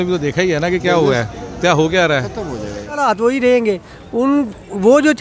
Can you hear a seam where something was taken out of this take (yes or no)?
yes